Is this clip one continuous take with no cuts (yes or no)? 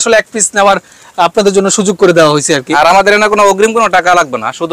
no